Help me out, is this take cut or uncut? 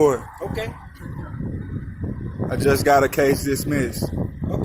uncut